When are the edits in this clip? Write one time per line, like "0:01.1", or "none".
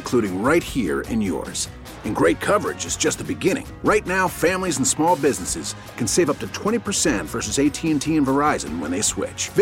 none